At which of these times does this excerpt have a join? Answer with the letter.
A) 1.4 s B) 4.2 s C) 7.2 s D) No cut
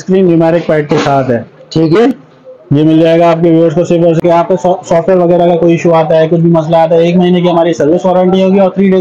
B